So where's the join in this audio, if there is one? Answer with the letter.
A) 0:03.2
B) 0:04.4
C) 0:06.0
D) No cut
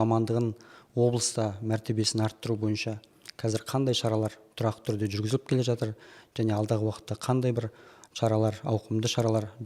D